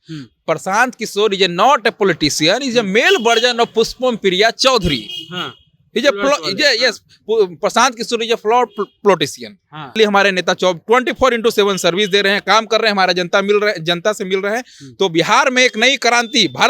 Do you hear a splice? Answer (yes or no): yes